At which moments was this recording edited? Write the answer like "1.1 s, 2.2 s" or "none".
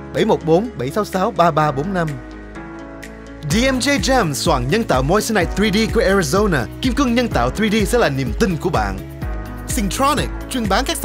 none